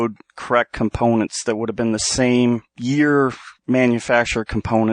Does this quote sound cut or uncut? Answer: cut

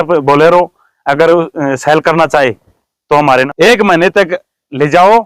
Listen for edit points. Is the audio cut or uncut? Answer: cut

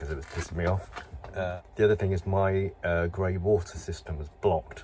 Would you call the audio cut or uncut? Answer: cut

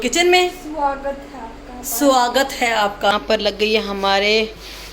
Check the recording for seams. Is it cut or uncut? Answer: cut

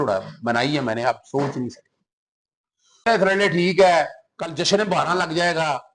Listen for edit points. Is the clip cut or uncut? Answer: cut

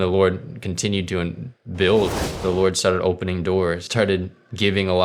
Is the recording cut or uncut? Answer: cut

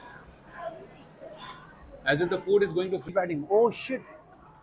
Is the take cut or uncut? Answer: cut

